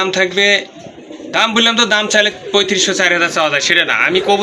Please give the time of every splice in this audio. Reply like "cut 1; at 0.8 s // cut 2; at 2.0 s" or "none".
none